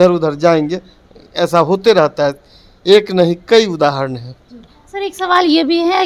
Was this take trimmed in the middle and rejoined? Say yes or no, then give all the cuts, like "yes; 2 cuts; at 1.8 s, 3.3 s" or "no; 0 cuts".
no; 0 cuts